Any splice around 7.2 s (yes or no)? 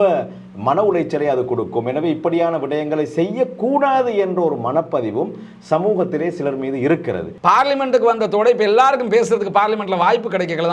yes